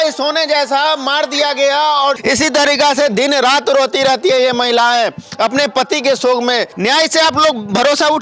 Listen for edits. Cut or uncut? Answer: cut